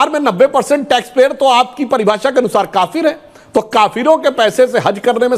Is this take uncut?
yes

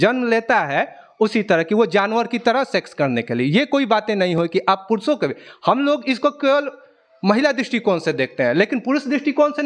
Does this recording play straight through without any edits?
yes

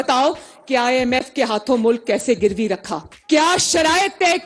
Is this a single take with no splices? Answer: yes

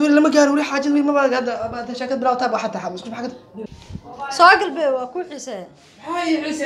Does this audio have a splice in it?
yes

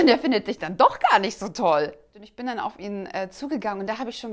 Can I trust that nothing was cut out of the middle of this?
no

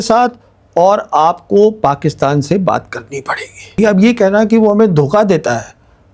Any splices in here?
yes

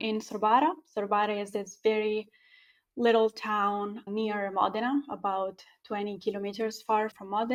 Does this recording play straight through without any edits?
yes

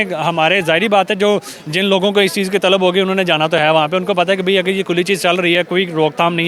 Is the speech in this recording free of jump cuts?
yes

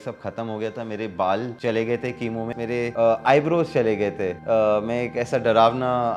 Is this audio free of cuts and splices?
no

